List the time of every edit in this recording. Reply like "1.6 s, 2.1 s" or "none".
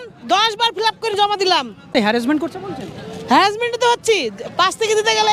none